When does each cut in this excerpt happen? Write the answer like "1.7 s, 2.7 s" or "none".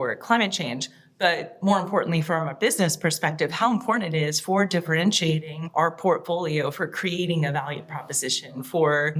5.6 s

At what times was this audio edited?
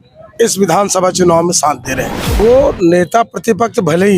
2.4 s

